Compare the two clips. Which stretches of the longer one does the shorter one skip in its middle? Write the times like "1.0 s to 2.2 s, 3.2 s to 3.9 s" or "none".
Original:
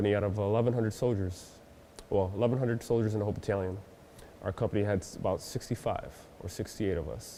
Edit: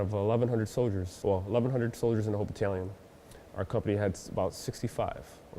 1.3 s to 1.9 s

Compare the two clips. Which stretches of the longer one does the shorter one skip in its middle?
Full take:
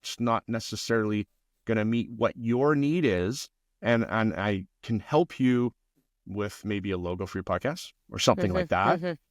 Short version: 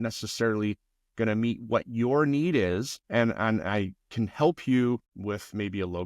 3.4 s to 3.7 s, 5.8 s to 6.2 s

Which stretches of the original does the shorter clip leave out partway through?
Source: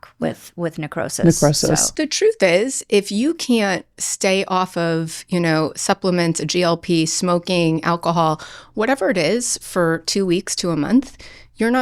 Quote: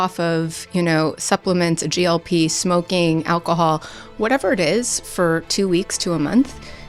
none

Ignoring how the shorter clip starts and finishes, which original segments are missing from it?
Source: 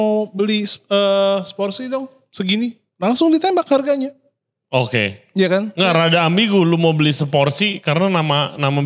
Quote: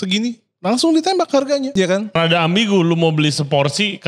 4.5 s to 6.0 s

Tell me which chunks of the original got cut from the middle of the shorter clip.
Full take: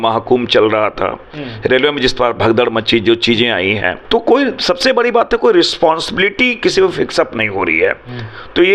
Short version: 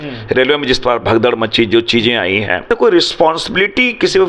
4.0 s to 5.3 s

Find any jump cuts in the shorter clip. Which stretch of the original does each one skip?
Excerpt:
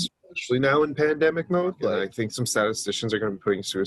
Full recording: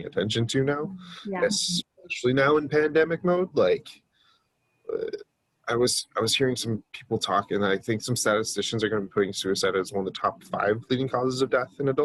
3.7 s to 7.7 s

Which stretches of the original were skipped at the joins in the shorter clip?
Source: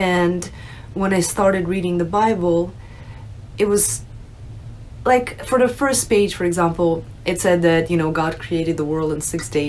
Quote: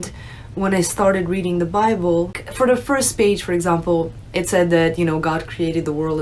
2.8 s to 5.4 s

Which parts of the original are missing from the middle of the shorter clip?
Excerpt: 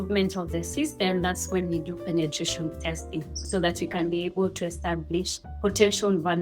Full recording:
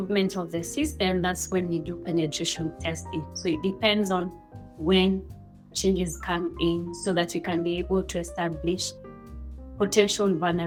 3.3 s to 6.9 s, 9.0 s to 9.6 s

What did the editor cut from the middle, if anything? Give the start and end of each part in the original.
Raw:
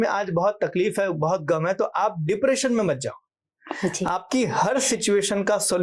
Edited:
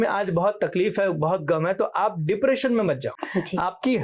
3.2 s to 3.6 s

